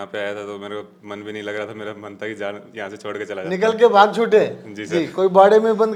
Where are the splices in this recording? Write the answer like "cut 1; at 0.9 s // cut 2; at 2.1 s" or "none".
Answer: none